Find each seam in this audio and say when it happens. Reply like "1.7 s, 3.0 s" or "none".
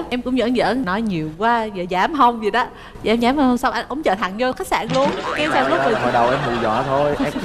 none